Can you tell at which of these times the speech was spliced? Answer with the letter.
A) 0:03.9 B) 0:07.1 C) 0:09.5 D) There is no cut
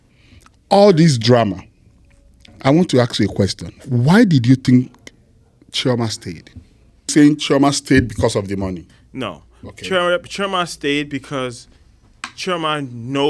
B